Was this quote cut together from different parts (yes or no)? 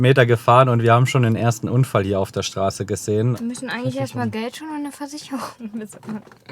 yes